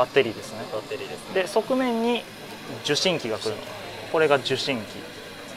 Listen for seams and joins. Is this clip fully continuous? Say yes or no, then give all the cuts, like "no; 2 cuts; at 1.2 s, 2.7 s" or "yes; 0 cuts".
yes; 0 cuts